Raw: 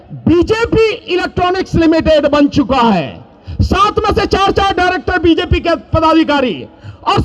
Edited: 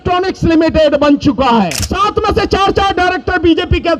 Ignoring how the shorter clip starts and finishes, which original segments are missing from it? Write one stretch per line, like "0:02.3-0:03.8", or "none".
0:03.2-0:03.6